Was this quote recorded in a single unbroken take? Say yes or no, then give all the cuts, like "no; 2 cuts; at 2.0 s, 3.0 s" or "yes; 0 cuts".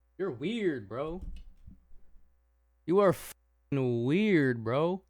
yes; 0 cuts